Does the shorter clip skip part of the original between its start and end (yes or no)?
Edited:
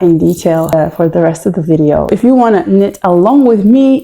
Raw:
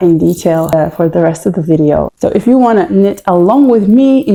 yes